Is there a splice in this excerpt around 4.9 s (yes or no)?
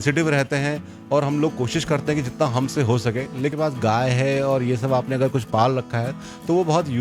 no